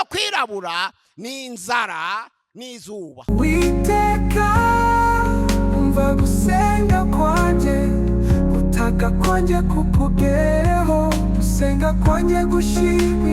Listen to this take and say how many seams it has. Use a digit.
1